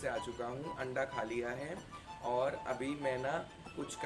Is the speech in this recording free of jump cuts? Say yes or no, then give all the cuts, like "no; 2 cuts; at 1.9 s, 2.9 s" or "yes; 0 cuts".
yes; 0 cuts